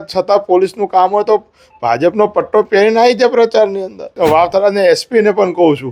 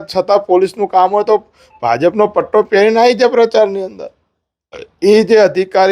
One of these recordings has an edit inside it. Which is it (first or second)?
first